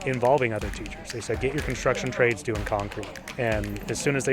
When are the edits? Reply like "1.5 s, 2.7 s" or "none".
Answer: none

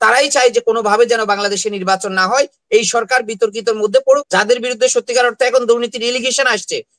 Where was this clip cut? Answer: 4.2 s

